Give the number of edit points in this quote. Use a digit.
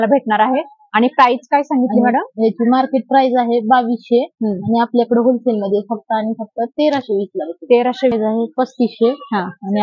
1